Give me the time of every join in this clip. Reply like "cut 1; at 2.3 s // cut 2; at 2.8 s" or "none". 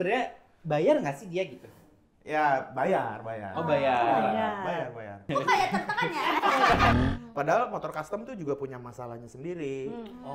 cut 1; at 7.0 s